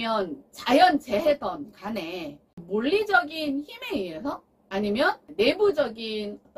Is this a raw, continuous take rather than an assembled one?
no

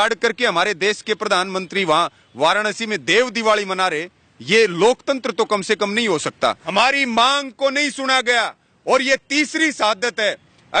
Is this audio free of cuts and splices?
no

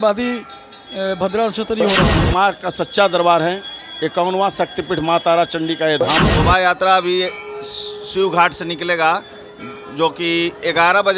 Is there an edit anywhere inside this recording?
yes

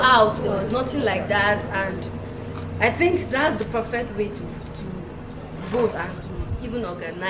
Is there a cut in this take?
no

